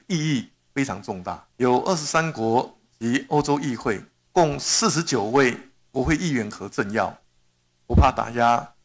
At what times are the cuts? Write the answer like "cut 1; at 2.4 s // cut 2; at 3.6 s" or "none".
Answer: cut 1; at 1.5 s

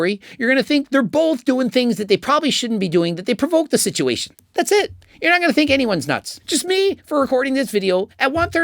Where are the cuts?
cut 1; at 4.3 s

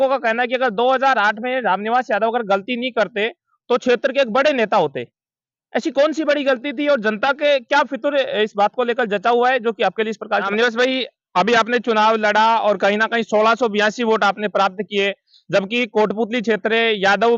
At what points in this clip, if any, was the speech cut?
cut 1; at 10.5 s

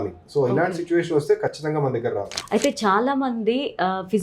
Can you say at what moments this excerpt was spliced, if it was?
cut 1; at 2.3 s

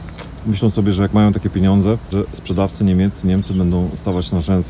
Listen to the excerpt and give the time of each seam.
cut 1; at 2.1 s

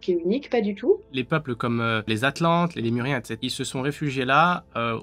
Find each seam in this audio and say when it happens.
cut 1; at 1.1 s // cut 2; at 2.1 s // cut 3; at 3.3 s

